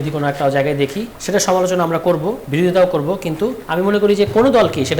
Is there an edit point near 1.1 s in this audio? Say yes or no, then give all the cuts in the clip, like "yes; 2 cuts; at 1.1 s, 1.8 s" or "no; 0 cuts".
yes; 3 cuts; at 1.1 s, 2.4 s, 3.6 s